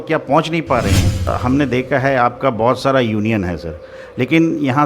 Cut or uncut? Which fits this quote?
cut